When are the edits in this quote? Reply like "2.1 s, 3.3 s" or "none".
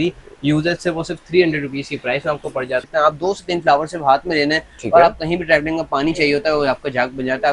2.8 s